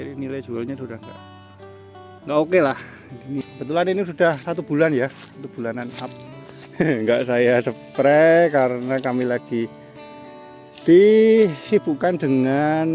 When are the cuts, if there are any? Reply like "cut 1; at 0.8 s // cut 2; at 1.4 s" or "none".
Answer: cut 1; at 3.4 s